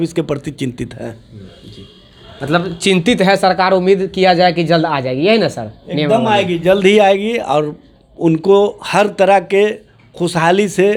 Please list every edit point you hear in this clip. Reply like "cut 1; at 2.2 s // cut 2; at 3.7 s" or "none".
none